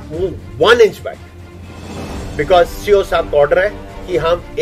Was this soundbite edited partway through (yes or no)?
no